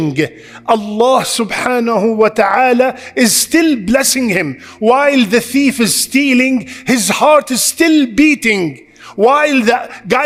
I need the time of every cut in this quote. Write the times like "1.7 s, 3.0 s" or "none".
none